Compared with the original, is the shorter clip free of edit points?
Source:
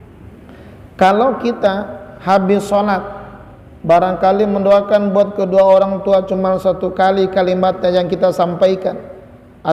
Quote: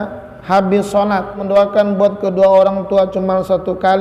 no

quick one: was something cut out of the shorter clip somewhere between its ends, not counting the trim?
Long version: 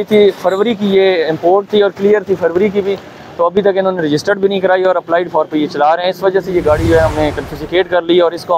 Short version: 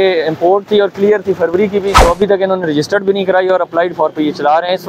yes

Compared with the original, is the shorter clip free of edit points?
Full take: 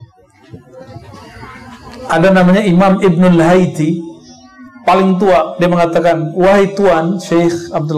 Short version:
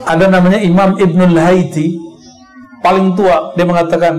yes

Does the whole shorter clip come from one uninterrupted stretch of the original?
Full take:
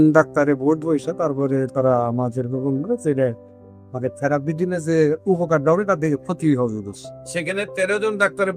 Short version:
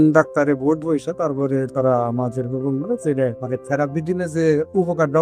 no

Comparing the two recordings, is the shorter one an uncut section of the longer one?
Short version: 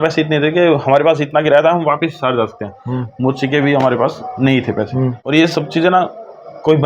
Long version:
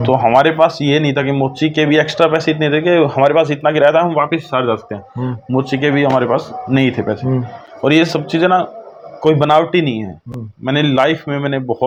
no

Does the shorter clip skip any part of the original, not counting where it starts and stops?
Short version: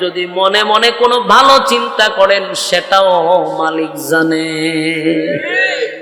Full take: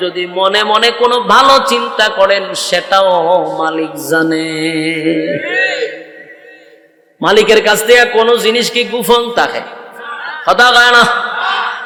no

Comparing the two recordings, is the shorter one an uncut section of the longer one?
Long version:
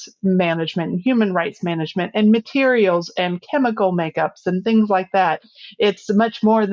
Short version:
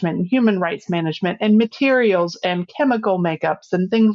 yes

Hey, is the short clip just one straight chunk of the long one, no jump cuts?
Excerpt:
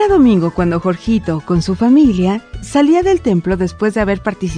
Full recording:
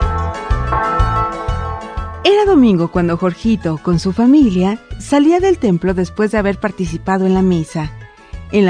yes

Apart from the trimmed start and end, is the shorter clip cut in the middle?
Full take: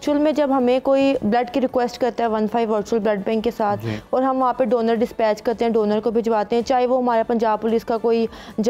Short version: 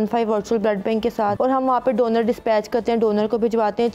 yes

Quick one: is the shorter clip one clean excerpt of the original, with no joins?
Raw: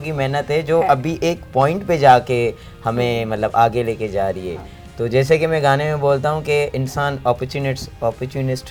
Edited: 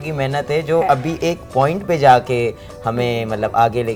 yes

